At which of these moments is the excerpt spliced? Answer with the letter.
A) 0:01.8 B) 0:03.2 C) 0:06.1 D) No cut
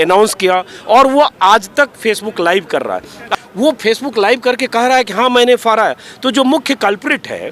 B